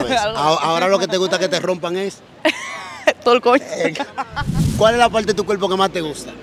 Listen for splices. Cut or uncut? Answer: cut